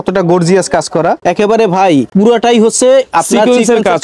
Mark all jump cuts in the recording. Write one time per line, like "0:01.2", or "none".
0:01.2
0:02.1